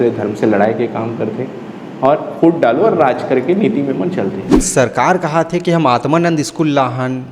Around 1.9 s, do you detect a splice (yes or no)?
no